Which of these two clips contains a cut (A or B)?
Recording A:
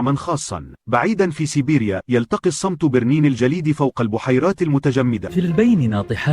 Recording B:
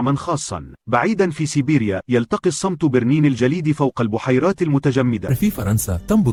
A